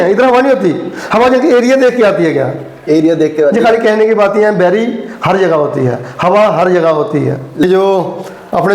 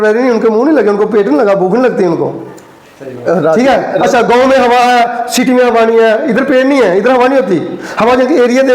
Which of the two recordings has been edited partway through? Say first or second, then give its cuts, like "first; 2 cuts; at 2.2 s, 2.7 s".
first; 1 cut; at 7.7 s